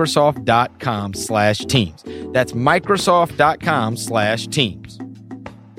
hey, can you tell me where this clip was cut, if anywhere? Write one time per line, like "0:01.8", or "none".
0:04.7